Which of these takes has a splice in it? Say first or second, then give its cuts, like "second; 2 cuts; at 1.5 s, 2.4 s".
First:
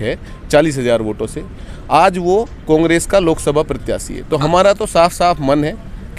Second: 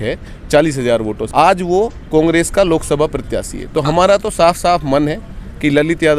second; 1 cut; at 1.2 s